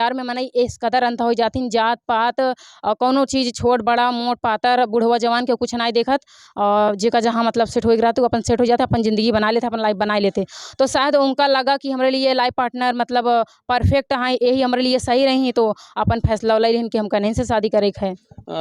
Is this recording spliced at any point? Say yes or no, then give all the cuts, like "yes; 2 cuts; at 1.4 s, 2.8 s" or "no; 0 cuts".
no; 0 cuts